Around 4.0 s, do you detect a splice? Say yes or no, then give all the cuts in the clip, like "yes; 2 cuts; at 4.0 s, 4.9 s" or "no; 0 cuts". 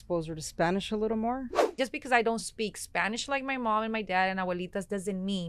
no; 1 cut; at 1.7 s